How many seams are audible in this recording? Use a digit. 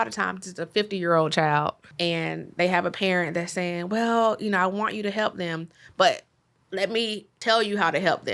2